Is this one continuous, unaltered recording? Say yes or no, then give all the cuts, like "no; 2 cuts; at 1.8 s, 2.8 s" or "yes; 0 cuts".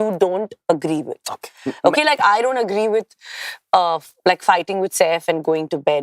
yes; 0 cuts